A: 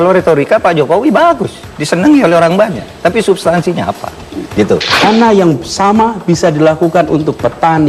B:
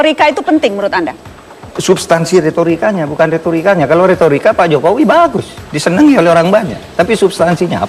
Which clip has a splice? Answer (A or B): A